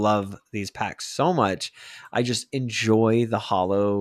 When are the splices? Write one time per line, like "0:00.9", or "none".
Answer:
none